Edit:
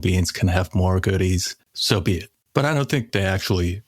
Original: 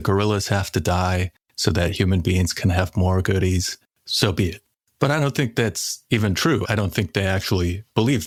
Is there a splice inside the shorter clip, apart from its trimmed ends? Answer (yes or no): yes